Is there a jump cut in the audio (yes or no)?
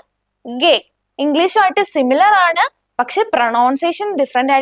yes